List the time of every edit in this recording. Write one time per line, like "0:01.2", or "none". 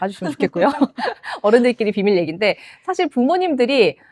none